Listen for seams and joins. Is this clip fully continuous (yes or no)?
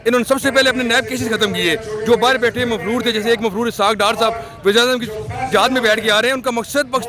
yes